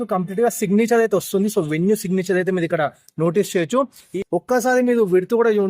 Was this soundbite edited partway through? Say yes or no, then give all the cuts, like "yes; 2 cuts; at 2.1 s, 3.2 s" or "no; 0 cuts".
yes; 1 cut; at 4.1 s